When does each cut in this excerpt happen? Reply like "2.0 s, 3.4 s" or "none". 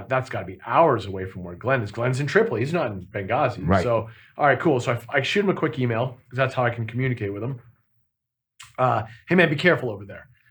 none